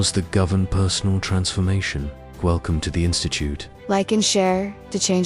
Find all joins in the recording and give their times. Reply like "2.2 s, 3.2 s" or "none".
3.7 s